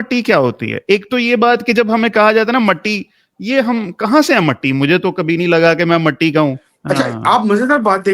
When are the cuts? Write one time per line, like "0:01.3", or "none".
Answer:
0:06.7